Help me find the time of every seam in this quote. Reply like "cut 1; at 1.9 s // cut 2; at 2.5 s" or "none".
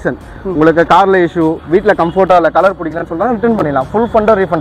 none